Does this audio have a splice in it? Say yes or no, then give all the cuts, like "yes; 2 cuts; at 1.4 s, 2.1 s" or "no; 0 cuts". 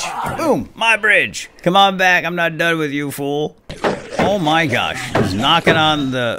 yes; 2 cuts; at 1.6 s, 3.7 s